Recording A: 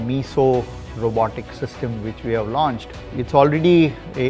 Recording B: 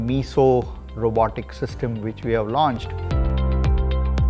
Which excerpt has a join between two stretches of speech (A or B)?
A